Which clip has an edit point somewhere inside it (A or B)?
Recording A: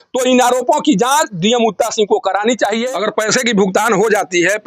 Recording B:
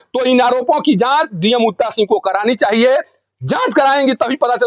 A